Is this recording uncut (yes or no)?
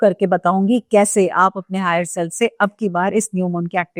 yes